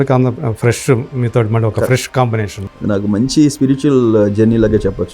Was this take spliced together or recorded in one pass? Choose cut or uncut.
cut